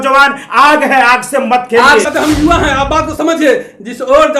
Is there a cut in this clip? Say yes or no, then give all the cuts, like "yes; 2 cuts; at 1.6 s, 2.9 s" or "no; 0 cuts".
yes; 1 cut; at 2.0 s